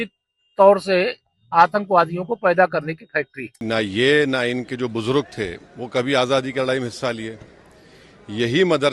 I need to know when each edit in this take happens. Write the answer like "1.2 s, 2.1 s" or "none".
3.5 s